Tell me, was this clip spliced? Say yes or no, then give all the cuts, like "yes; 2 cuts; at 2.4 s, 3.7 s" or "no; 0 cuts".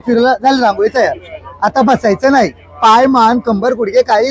no; 0 cuts